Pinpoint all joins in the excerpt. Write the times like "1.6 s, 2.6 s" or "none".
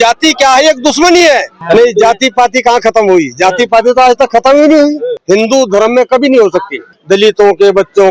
1.5 s, 5.1 s, 6.9 s